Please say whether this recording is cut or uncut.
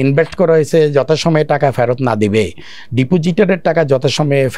uncut